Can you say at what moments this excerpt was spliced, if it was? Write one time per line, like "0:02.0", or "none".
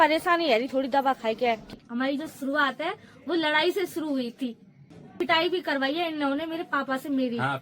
0:01.8
0:05.1